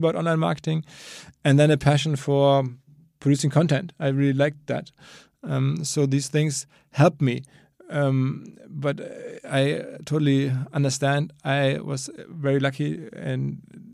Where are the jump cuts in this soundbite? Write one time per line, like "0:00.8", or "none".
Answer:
none